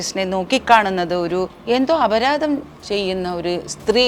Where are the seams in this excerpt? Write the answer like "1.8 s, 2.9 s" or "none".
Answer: 1.5 s